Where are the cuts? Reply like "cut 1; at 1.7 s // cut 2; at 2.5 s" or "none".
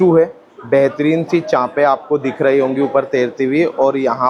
none